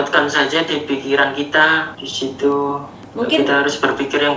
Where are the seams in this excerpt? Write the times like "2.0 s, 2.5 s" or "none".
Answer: none